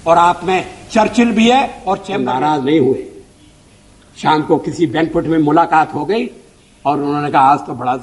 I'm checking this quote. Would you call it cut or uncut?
cut